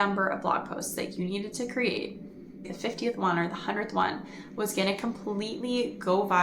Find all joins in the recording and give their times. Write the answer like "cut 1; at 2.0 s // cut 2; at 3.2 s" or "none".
cut 1; at 2.6 s